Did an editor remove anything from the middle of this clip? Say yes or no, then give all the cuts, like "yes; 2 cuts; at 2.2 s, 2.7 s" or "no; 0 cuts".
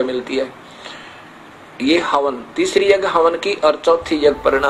no; 0 cuts